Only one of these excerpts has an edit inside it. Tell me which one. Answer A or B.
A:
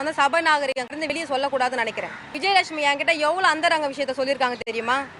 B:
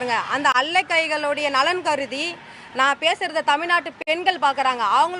A